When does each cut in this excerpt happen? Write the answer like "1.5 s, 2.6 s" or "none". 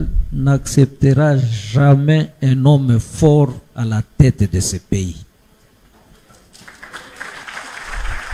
none